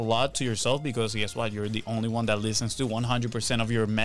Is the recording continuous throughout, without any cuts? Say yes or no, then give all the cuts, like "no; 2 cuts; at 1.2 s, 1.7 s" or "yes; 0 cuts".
yes; 0 cuts